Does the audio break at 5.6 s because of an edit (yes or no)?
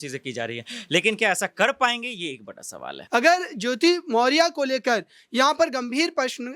no